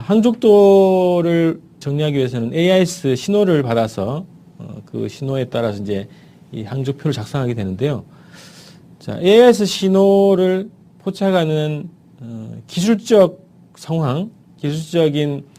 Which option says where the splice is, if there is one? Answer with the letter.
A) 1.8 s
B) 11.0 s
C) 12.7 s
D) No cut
B